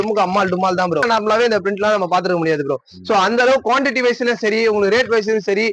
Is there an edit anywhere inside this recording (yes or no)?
yes